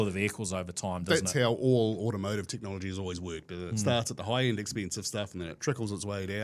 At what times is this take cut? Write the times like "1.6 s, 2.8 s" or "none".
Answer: none